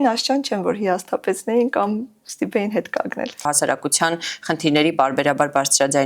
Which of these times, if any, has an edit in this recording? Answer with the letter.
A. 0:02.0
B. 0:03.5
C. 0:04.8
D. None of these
B